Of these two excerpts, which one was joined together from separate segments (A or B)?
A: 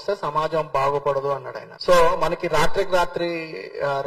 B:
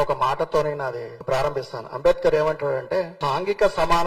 B